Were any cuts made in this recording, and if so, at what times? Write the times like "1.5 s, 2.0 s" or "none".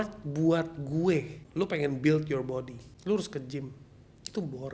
1.4 s, 2.8 s